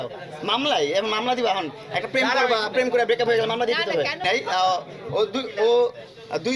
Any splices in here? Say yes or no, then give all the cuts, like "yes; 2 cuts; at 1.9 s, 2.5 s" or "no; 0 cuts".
yes; 1 cut; at 4.3 s